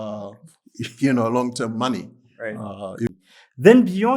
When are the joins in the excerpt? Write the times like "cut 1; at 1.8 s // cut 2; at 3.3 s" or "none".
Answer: cut 1; at 3.1 s